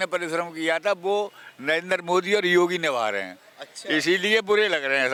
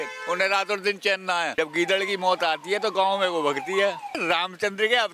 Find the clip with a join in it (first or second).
second